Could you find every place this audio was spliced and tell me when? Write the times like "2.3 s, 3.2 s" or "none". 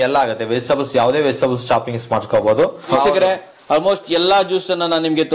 3.0 s